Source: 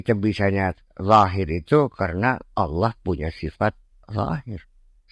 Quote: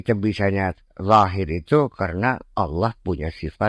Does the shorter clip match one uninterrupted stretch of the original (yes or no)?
yes